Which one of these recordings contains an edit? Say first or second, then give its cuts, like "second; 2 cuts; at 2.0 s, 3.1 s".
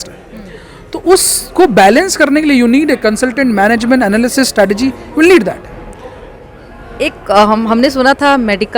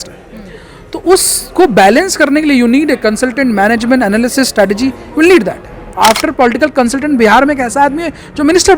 second; 1 cut; at 5.9 s